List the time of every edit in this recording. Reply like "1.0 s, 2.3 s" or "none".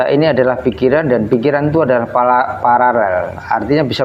none